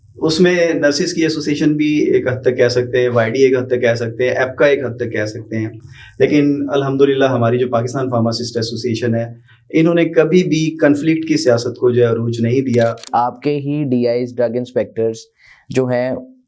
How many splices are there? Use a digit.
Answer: 1